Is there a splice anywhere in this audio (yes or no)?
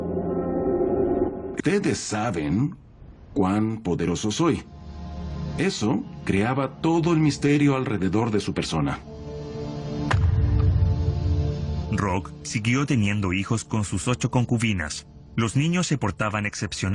no